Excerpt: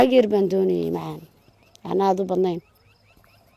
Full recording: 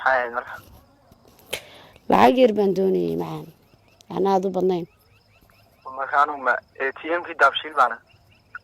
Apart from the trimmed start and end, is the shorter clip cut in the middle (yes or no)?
no